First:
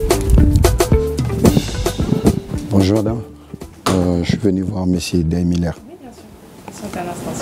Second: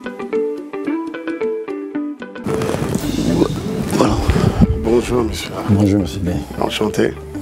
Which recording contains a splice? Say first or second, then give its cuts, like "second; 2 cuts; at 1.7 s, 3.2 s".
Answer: second; 1 cut; at 2.4 s